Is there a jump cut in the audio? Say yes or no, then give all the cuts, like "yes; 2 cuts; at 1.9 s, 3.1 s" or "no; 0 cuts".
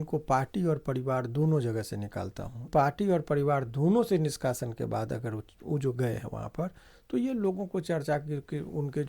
yes; 1 cut; at 2.7 s